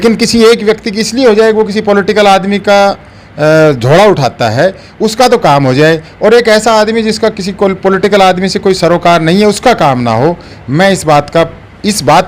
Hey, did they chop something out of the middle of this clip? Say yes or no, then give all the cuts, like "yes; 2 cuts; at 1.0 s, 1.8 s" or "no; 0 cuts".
no; 0 cuts